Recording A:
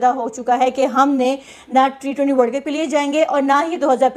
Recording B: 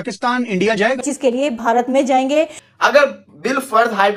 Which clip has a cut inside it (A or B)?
B